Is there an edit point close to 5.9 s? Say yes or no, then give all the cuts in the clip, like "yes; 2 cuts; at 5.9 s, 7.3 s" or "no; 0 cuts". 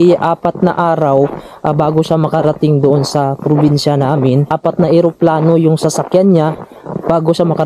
no; 1 cut; at 4.5 s